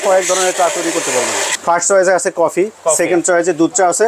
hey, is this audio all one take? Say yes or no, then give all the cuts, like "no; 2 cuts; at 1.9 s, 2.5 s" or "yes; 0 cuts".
no; 1 cut; at 1.5 s